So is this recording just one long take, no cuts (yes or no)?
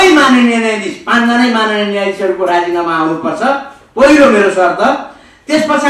yes